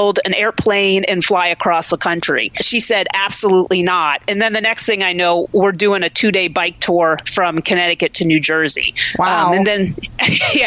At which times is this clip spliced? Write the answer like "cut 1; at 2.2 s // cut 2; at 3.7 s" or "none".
cut 1; at 2.6 s

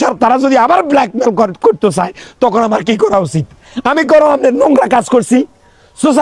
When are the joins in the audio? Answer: none

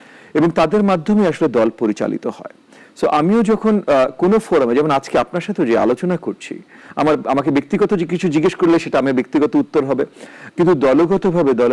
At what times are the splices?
none

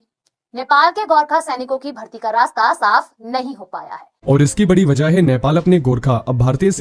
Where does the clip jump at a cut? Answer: cut 1; at 4.1 s

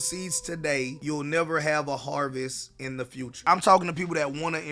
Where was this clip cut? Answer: cut 1; at 3.4 s

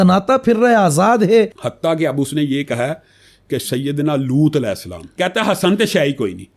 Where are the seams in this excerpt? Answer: cut 1; at 1.6 s // cut 2; at 5.0 s

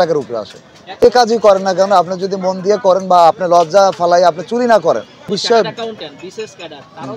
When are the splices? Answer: cut 1; at 1.0 s // cut 2; at 5.3 s

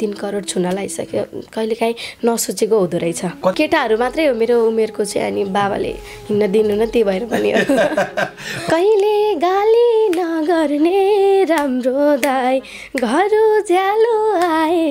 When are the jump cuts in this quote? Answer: cut 1; at 3.5 s // cut 2; at 8.5 s

